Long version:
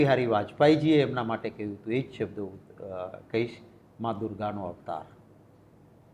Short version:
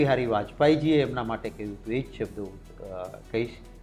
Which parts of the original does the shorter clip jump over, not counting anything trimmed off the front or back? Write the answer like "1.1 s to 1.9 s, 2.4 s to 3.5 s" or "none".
none